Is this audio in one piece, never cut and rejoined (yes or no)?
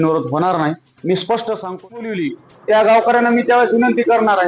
no